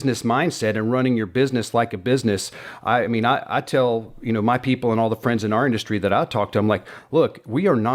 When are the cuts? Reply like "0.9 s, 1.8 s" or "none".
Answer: none